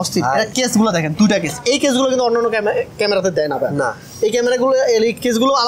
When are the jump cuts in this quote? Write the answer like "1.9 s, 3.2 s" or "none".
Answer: none

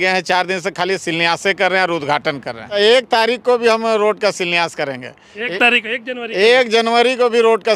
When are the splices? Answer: 2.8 s

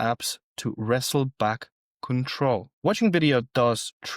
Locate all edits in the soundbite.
2.7 s

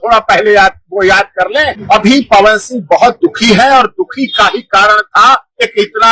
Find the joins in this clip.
1.7 s

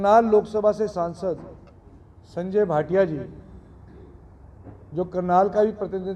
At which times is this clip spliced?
none

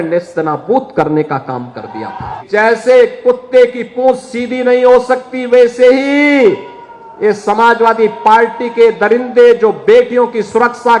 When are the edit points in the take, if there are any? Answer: 2.4 s

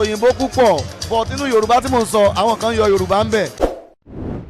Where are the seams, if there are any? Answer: 3.6 s

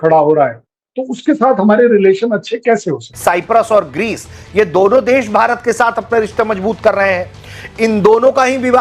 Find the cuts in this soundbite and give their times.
3.0 s

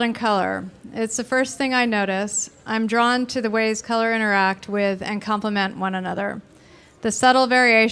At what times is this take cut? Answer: 5.1 s

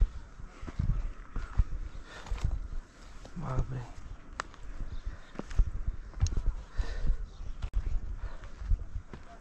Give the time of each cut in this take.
none

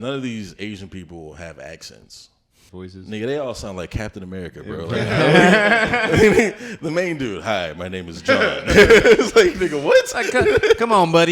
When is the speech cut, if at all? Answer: 2.7 s

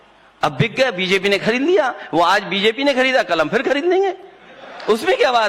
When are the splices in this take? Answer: 4.2 s

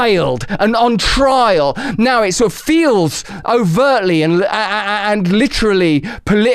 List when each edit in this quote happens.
1.8 s

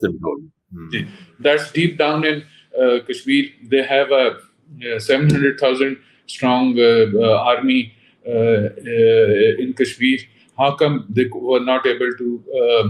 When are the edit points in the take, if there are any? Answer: none

